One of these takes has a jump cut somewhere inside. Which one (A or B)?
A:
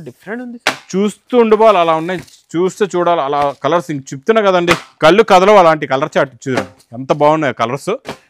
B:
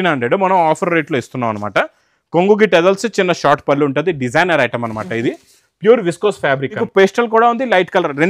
B